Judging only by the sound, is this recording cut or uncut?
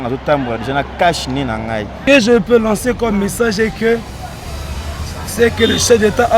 cut